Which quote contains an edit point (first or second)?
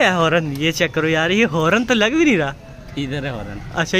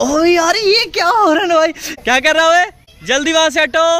second